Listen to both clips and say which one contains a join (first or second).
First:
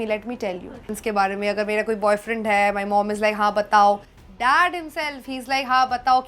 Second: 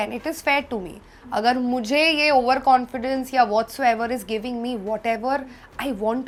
first